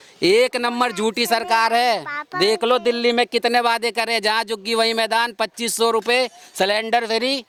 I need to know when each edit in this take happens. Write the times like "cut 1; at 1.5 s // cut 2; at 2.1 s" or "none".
none

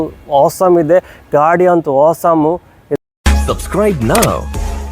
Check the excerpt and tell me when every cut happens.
cut 1; at 3.0 s

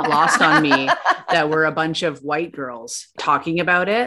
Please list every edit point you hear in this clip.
cut 1; at 3.1 s

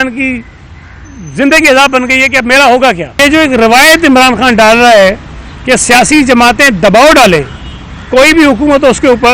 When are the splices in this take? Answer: cut 1; at 3.2 s

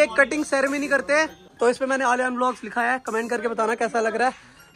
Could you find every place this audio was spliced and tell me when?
cut 1; at 1.5 s

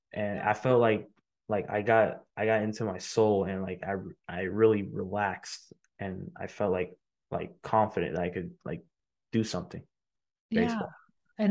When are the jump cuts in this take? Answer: none

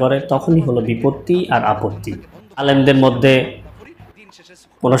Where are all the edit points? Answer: cut 1; at 2.6 s

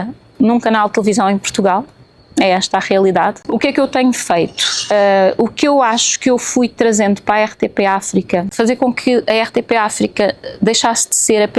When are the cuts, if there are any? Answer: cut 1; at 3.4 s // cut 2; at 8.5 s

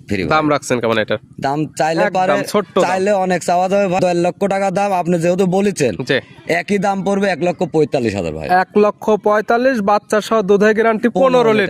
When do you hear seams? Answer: cut 1; at 4.0 s

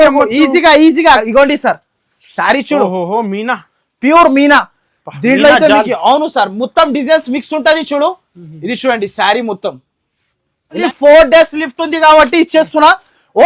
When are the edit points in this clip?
cut 1; at 1.2 s // cut 2; at 10.8 s

